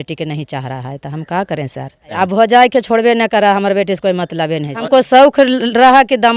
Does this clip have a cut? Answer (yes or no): yes